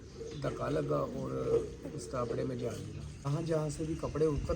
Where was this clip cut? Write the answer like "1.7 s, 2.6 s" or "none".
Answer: 3.3 s